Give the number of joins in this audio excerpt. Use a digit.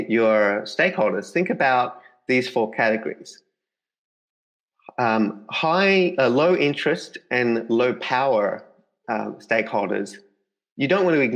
0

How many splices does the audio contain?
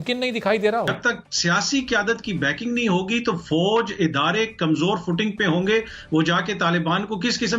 1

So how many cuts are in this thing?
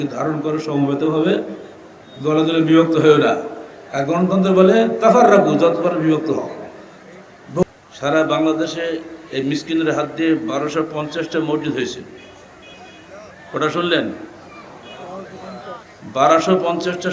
1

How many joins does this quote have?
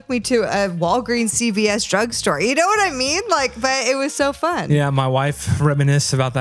0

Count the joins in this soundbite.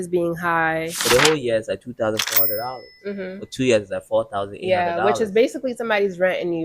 1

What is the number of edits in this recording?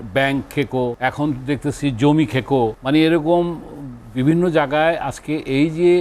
2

